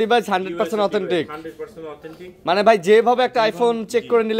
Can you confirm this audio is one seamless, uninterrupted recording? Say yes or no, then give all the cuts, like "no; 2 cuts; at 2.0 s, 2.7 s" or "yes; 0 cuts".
yes; 0 cuts